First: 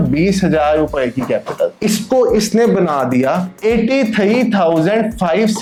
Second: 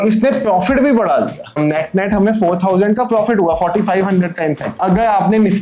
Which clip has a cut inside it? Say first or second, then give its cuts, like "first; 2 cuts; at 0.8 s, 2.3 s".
second; 2 cuts; at 1.6 s, 4.7 s